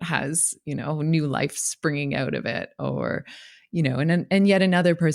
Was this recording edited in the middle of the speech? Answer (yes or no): no